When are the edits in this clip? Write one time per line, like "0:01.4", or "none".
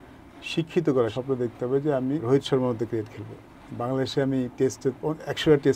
0:01.1
0:02.2